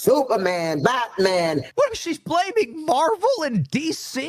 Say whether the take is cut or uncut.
cut